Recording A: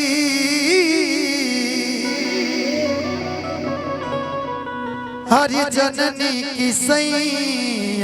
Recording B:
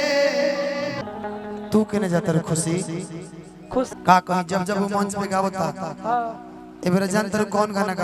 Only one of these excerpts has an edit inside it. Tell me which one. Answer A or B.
B